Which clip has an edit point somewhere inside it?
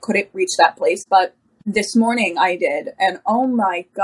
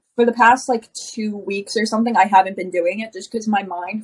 first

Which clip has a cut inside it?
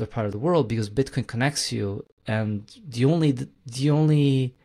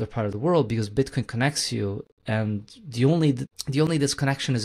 second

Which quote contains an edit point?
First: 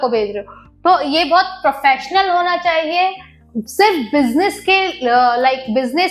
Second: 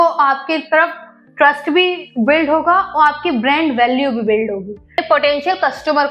second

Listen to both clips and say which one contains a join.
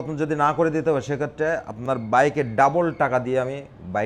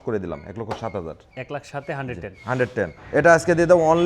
second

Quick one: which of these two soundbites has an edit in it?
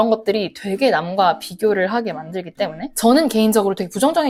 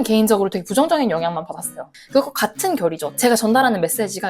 second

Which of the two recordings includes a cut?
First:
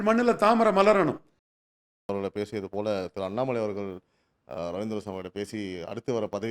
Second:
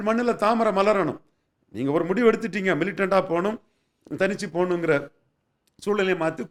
first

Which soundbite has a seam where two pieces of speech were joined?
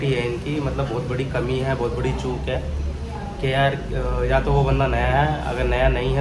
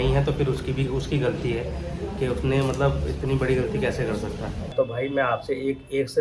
second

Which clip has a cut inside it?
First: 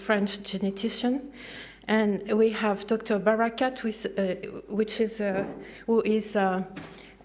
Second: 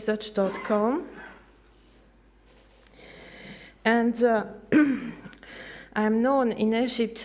first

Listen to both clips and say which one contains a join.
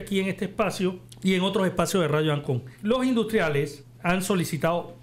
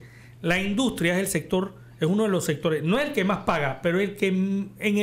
first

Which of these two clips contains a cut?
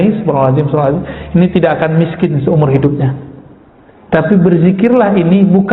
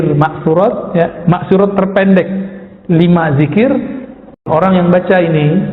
second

